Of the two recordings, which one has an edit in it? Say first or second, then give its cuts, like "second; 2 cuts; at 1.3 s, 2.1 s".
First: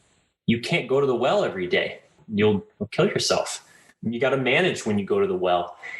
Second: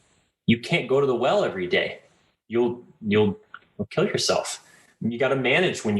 first; 2 cuts; at 2.2 s, 2.8 s